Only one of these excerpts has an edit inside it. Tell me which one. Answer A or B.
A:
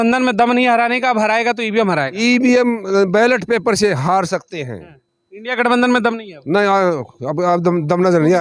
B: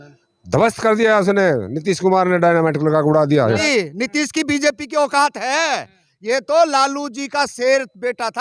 B